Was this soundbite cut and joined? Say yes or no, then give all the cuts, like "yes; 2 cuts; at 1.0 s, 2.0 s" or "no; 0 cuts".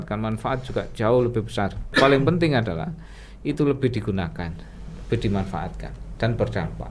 yes; 1 cut; at 1.9 s